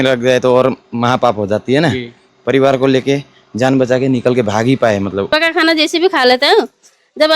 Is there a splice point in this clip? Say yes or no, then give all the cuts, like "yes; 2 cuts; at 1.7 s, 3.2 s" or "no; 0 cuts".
yes; 2 cuts; at 2.2 s, 5.3 s